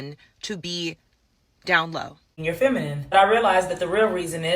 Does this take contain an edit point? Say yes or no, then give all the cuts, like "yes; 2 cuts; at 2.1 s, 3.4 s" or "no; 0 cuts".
yes; 1 cut; at 2.3 s